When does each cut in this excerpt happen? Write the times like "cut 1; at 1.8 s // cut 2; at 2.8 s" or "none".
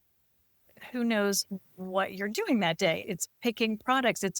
cut 1; at 3.0 s